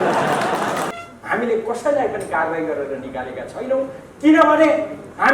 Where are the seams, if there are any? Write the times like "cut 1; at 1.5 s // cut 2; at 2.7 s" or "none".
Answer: cut 1; at 0.9 s